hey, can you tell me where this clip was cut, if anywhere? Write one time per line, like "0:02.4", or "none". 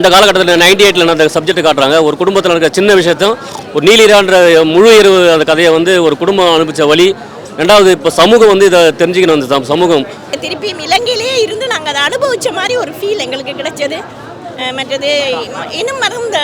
0:10.2